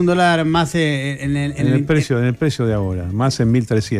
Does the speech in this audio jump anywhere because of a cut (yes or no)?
no